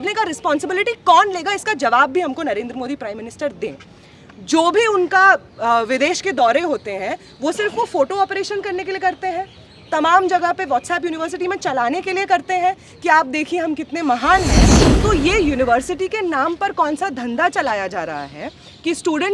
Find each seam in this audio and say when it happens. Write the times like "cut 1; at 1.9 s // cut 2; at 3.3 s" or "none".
cut 1; at 14.8 s